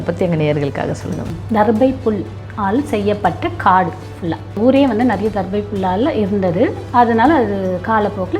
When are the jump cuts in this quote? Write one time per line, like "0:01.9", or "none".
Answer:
0:01.4
0:04.6